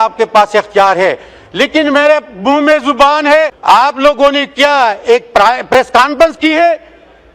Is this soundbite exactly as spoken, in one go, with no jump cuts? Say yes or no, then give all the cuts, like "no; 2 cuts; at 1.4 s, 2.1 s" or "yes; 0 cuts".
no; 1 cut; at 3.6 s